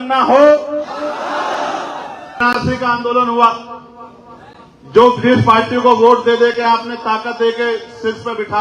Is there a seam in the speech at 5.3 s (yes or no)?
no